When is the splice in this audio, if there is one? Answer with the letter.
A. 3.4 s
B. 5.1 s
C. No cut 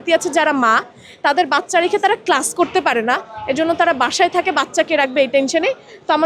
C